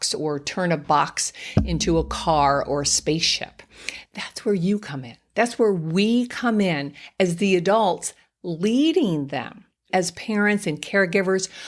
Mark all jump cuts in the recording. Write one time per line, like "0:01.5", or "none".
none